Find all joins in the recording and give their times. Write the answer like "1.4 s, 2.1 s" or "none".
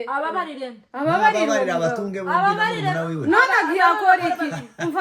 none